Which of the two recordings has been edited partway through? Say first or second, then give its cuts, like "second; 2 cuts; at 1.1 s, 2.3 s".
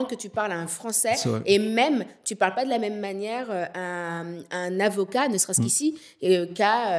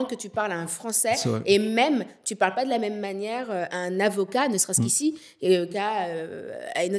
second; 2 cuts; at 3.7 s, 5.7 s